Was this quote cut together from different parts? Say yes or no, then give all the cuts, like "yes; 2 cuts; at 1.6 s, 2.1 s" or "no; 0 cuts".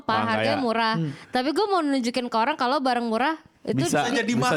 no; 0 cuts